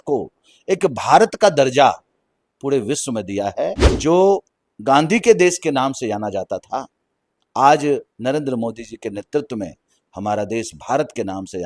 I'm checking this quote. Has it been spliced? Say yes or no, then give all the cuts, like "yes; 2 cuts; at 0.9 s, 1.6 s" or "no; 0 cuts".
yes; 1 cut; at 3.9 s